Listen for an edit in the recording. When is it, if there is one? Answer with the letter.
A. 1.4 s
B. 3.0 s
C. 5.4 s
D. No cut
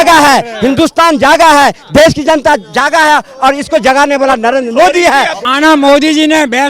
C